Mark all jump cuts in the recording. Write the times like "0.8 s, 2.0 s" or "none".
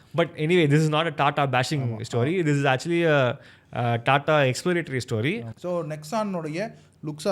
5.5 s